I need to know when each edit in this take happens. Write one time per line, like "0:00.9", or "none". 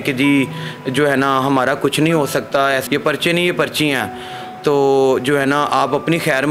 0:02.8

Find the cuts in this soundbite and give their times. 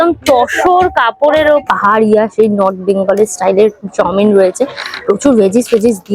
0:01.6

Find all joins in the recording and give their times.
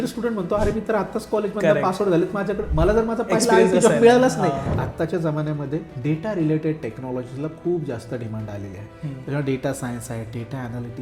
0:04.7
0:05.9

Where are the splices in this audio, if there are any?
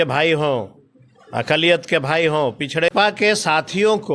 0:02.9

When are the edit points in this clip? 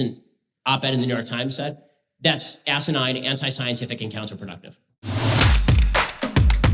0:05.1

